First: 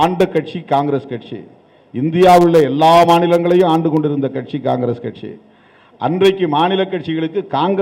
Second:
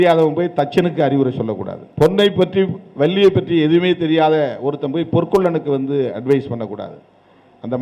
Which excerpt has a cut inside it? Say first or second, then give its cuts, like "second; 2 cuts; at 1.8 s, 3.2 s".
second; 1 cut; at 1.8 s